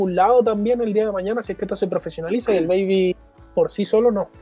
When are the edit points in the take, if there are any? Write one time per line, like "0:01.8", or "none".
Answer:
0:03.3